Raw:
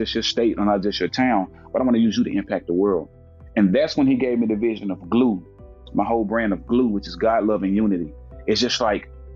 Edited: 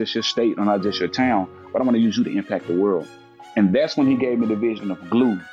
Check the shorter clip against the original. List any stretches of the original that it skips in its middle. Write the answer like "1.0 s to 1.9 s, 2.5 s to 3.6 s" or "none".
none